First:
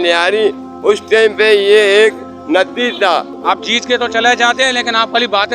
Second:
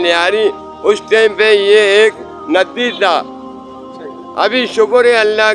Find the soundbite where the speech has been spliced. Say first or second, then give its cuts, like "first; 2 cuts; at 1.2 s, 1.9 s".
first; 1 cut; at 3.3 s